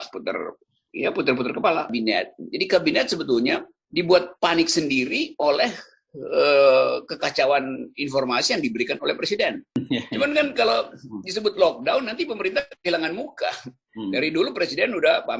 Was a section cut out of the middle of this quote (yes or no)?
yes